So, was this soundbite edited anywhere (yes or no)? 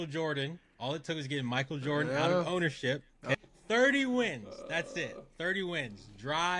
yes